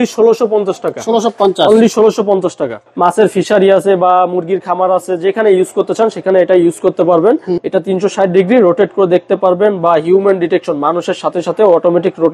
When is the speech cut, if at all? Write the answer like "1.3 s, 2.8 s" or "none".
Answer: 2.8 s, 7.6 s